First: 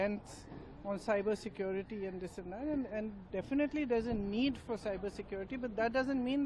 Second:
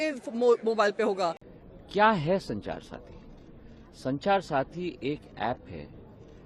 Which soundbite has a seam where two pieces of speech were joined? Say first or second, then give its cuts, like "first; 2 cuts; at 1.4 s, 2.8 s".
second; 1 cut; at 1.5 s